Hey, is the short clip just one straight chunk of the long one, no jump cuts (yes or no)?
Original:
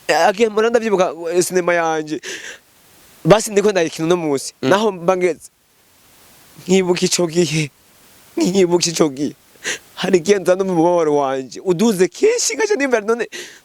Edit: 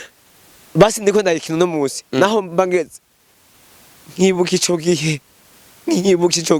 yes